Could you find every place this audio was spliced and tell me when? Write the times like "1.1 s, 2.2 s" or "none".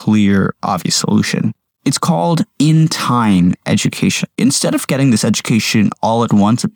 1.7 s, 4.3 s